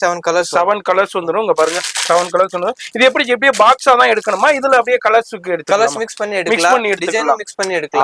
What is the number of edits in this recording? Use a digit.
0